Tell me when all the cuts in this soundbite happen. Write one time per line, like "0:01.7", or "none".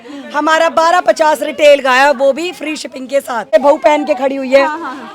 0:03.5